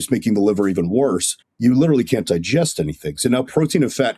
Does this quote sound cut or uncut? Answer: uncut